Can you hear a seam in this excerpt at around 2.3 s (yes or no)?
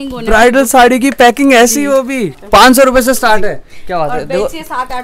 yes